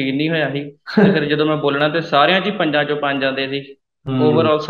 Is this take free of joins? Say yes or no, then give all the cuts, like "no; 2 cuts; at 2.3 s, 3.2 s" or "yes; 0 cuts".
yes; 0 cuts